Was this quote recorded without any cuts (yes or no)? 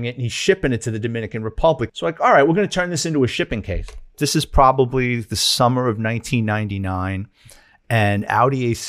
no